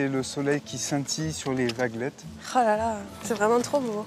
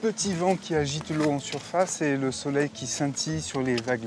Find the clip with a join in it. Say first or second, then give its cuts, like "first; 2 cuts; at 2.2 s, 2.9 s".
first; 1 cut; at 3.1 s